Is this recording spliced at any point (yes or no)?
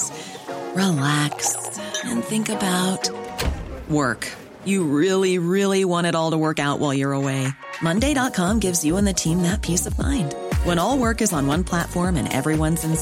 no